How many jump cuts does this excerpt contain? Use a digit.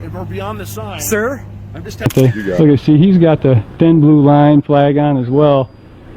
1